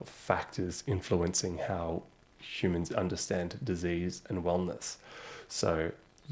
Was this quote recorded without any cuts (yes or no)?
yes